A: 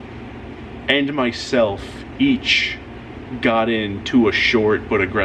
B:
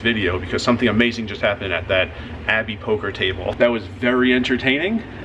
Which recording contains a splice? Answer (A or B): B